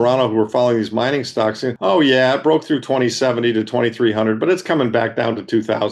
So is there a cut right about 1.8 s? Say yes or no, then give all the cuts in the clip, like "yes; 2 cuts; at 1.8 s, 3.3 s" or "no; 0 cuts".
yes; 1 cut; at 1.8 s